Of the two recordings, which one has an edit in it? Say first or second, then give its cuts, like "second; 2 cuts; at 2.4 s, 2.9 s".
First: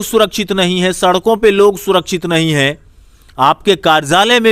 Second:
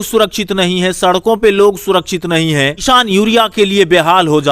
second; 1 cut; at 2.8 s